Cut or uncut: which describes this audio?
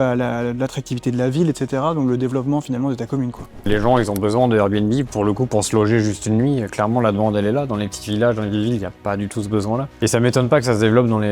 cut